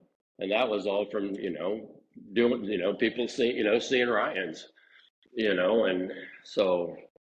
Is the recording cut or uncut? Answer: uncut